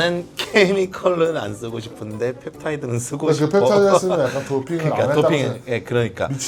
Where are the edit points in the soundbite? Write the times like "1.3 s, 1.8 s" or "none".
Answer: none